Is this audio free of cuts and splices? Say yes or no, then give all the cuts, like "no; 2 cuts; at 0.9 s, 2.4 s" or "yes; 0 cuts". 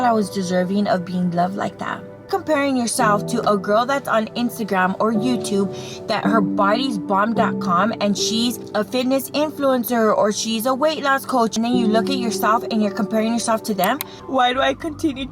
no; 4 cuts; at 2.3 s, 8.6 s, 11.6 s, 14.2 s